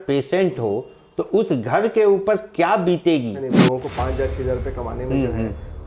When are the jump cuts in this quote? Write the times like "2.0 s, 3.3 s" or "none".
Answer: 3.5 s